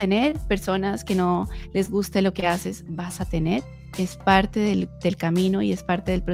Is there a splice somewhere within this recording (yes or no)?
no